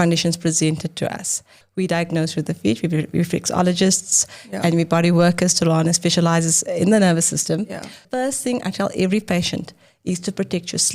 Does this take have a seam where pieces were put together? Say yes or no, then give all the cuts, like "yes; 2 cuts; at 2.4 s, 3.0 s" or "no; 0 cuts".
yes; 2 cuts; at 1.6 s, 8.0 s